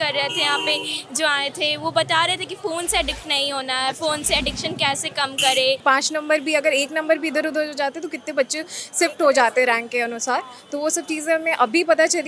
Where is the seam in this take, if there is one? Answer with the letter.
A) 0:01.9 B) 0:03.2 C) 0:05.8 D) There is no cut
C